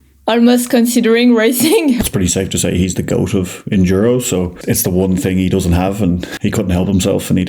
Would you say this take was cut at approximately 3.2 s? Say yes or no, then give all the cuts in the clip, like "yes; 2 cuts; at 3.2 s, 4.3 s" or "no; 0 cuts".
no; 3 cuts; at 2.0 s, 4.5 s, 6.3 s